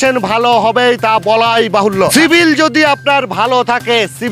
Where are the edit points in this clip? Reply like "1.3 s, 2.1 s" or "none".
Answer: 2.1 s